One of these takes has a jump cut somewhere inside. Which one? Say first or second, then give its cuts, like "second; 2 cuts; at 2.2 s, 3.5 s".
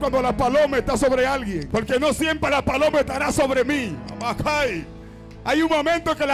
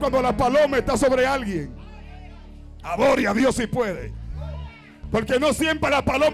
first; 1 cut; at 1.6 s